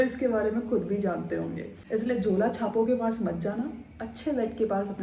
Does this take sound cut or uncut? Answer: cut